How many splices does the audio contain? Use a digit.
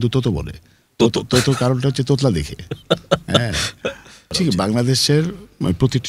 1